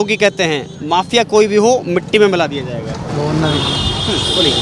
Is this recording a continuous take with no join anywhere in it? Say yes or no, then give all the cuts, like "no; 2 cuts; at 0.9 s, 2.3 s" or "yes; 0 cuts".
no; 1 cut; at 3.0 s